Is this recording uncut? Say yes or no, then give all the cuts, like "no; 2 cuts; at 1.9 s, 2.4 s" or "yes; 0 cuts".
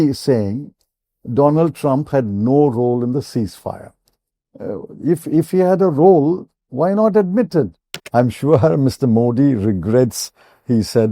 no; 1 cut; at 7.9 s